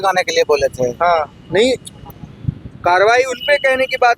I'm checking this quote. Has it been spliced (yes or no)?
no